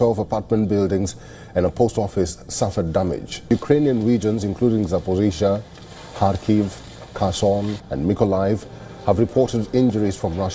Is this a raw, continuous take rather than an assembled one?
yes; 0 cuts

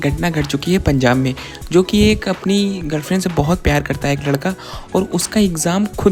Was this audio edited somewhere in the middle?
no; 0 cuts

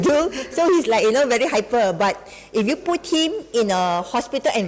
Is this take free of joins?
yes; 0 cuts

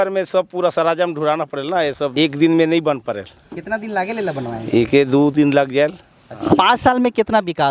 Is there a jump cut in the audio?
yes; 2 cuts; at 2.1 s, 6.4 s

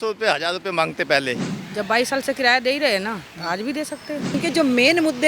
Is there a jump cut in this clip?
yes; 2 cuts; at 1.5 s, 4.4 s

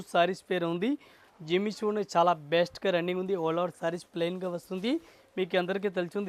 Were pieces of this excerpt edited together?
no; 0 cuts

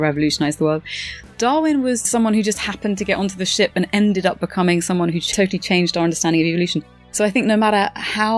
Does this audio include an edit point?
no; 0 cuts

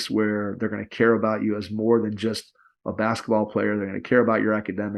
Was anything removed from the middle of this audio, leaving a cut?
no; 0 cuts

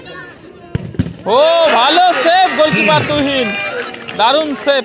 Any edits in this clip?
no; 0 cuts

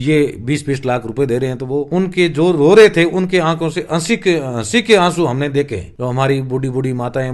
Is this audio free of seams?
yes; 0 cuts

